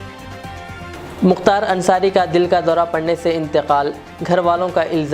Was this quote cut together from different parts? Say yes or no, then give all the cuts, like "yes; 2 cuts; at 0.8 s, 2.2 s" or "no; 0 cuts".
yes; 1 cut; at 0.9 s